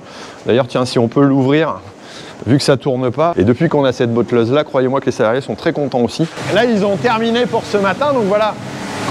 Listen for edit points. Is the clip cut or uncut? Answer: cut